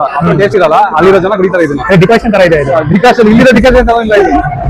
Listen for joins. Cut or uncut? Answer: uncut